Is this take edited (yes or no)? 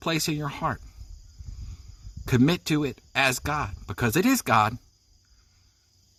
no